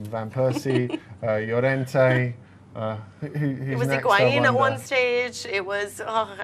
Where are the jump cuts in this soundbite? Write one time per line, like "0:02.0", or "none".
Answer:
0:03.1